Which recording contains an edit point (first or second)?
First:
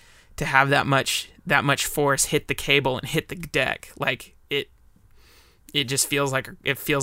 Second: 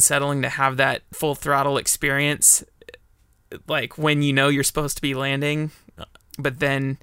second